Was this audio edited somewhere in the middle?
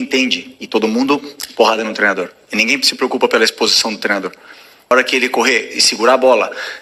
yes; 1 cut; at 4.9 s

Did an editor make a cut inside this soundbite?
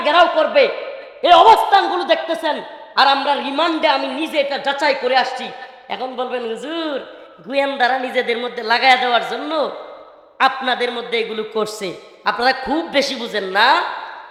no; 0 cuts

